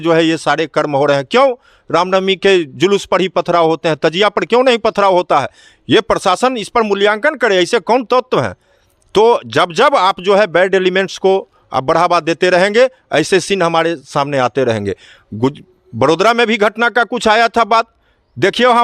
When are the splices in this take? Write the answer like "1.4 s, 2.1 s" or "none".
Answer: none